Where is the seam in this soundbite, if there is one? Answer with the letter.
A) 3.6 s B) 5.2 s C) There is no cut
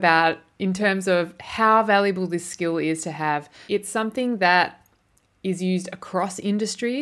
A